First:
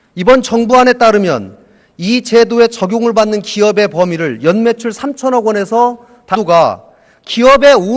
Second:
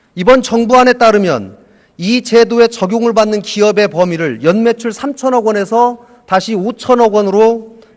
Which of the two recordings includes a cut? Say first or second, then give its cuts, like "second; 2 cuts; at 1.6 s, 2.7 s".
second; 1 cut; at 6.3 s